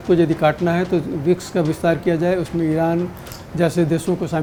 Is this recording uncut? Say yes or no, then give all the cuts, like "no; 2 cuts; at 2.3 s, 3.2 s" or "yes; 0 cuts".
yes; 0 cuts